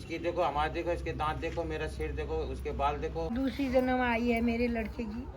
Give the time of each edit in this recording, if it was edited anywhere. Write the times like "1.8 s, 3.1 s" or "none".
3.3 s